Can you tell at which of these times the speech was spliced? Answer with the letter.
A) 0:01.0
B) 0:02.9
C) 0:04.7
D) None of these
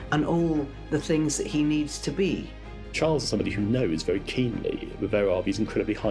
B